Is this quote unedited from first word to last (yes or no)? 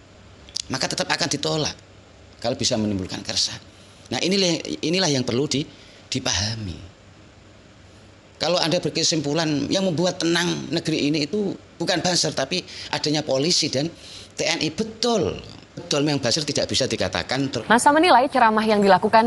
no